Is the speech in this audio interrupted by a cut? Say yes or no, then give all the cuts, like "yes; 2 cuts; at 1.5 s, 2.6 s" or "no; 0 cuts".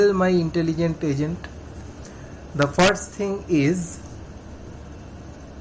no; 0 cuts